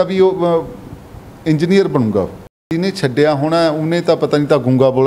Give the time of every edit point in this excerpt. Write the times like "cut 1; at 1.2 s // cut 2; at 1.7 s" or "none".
cut 1; at 2.7 s